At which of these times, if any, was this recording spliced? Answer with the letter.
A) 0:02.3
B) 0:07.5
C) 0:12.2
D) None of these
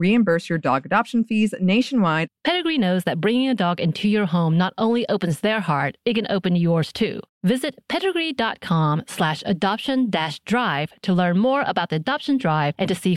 A